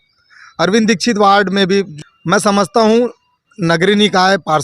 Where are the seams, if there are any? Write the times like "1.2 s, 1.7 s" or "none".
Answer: 1.9 s